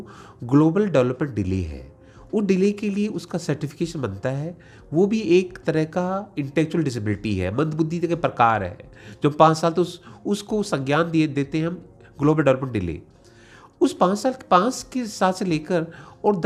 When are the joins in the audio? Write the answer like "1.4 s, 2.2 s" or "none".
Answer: none